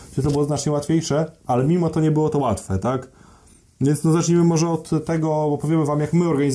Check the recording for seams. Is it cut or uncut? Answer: uncut